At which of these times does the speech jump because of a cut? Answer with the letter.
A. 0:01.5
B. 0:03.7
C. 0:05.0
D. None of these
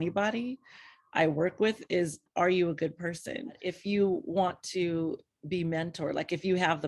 B